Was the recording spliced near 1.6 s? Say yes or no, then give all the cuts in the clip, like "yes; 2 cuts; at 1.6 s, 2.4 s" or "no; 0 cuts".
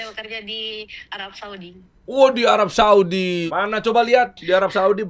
no; 1 cut; at 3.5 s